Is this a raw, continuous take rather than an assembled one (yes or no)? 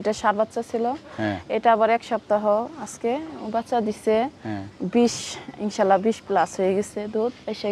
yes